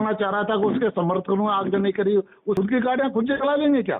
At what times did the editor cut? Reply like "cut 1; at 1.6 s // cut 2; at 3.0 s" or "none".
cut 1; at 2.6 s